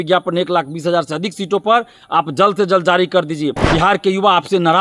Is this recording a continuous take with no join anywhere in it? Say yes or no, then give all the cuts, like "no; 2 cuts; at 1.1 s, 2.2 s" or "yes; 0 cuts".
no; 1 cut; at 3.6 s